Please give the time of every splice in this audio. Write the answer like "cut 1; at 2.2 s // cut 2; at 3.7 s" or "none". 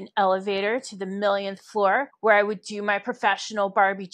cut 1; at 2.1 s